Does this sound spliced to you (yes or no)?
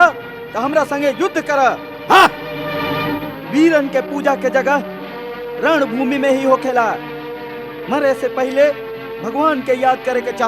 yes